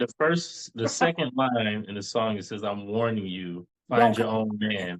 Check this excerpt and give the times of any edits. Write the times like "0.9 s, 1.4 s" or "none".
3.7 s